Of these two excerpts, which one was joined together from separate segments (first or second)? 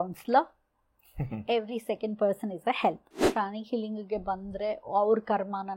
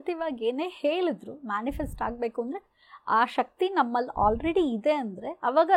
first